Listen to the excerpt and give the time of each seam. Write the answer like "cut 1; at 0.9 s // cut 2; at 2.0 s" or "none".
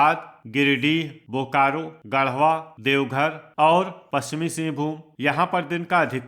cut 1; at 1.9 s // cut 2; at 4.0 s // cut 3; at 5.1 s